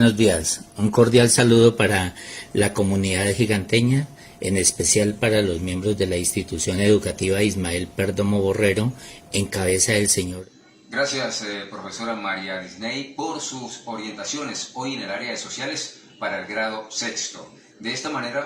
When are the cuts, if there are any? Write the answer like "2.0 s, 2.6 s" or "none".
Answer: 10.3 s